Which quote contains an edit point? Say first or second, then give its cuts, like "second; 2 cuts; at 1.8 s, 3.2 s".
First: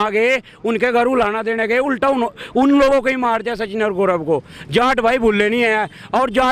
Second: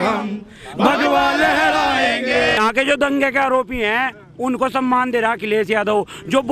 second; 1 cut; at 2.6 s